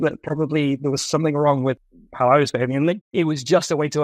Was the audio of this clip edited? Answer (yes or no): yes